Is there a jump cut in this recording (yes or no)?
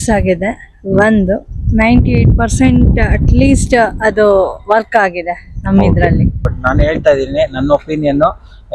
yes